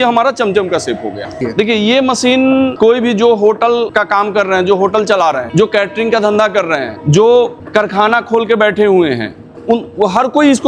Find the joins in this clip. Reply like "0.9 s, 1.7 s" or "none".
1.4 s, 2.7 s, 3.9 s, 5.4 s, 6.9 s, 7.6 s